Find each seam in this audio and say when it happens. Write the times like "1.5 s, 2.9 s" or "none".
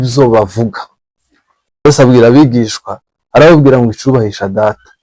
1.9 s

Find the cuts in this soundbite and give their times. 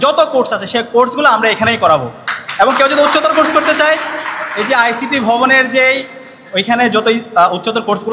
none

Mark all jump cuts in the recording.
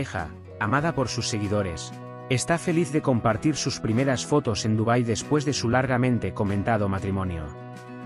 none

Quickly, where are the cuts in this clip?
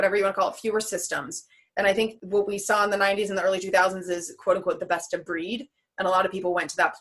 2.2 s

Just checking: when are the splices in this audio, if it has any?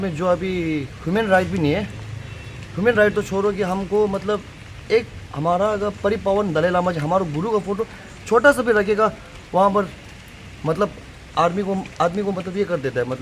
none

